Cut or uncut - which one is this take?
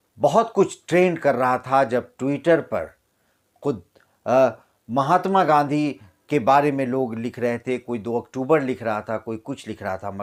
uncut